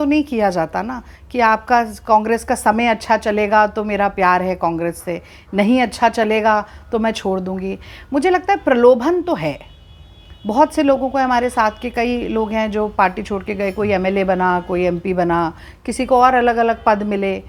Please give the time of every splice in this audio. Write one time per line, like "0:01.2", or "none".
none